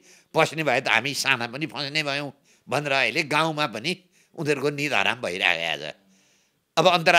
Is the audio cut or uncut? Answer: uncut